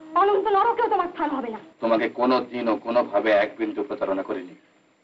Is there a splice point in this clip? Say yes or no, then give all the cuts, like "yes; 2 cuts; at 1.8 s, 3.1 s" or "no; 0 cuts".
yes; 1 cut; at 1.6 s